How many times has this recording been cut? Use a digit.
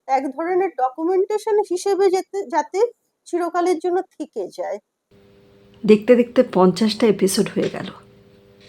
0